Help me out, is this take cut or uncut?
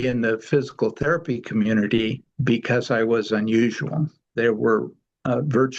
cut